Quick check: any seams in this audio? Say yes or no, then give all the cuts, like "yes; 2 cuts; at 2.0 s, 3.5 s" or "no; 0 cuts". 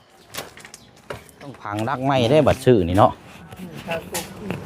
yes; 1 cut; at 1.7 s